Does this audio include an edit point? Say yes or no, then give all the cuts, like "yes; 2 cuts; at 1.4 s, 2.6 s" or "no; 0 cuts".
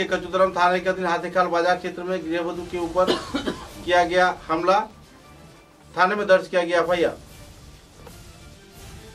no; 0 cuts